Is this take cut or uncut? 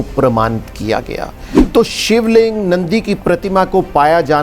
cut